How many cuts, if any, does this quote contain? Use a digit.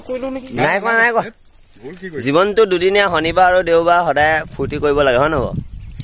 0